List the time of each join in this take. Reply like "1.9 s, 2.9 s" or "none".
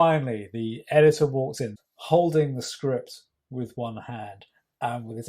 1.7 s